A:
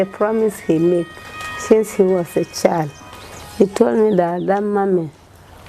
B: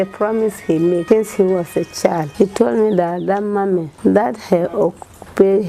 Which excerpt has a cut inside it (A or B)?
B